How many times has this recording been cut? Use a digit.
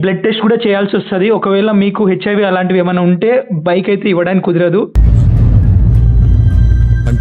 0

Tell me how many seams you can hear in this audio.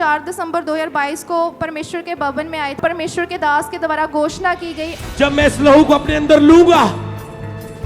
2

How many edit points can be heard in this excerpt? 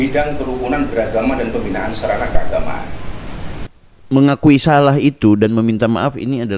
1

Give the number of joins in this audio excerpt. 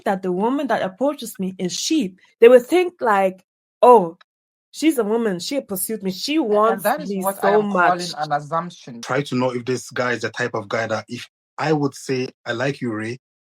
2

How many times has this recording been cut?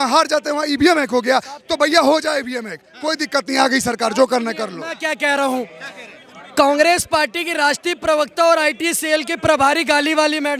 0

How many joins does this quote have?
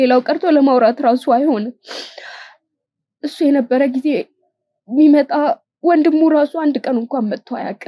0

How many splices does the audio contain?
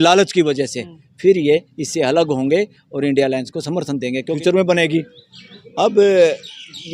1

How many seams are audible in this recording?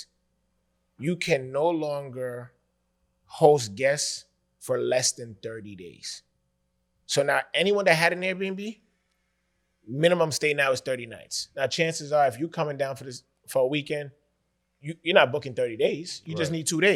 0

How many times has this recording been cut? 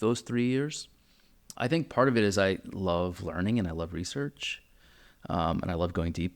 1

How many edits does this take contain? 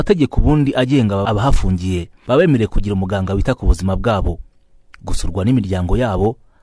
1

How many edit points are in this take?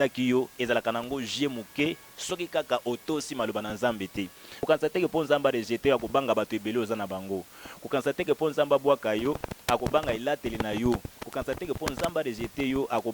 1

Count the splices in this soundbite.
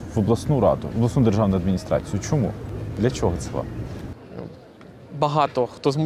0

